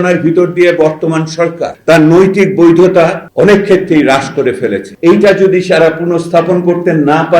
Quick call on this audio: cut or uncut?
cut